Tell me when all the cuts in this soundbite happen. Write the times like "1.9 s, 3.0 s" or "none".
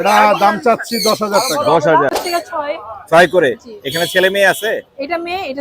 2.2 s